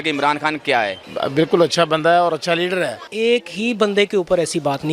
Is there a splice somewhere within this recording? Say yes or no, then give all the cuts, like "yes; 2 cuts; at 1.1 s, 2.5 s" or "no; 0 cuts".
yes; 2 cuts; at 1.1 s, 3.0 s